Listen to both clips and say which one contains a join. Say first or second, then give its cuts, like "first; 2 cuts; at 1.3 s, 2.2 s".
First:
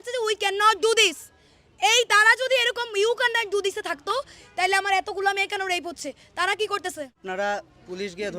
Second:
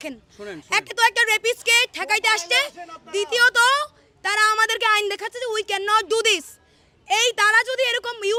first; 1 cut; at 7.2 s